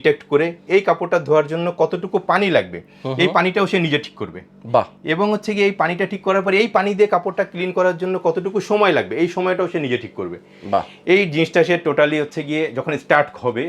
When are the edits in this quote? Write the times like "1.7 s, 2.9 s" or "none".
none